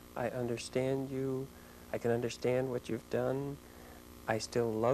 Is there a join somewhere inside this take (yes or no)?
no